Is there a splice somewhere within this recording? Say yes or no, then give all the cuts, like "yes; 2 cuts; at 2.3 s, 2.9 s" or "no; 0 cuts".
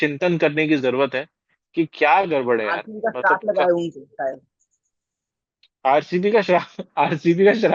no; 0 cuts